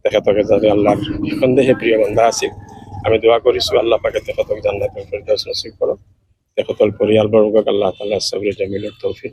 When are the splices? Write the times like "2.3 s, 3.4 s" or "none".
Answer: none

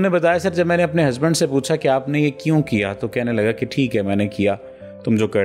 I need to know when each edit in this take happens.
none

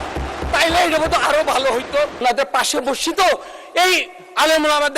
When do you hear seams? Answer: 2.2 s

